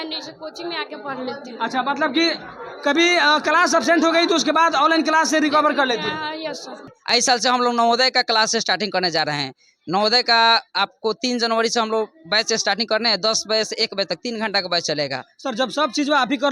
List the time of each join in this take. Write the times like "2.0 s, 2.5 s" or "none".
6.9 s